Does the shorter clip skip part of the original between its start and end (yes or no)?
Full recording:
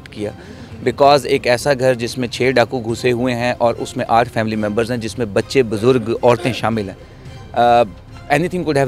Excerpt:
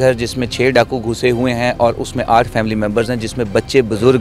no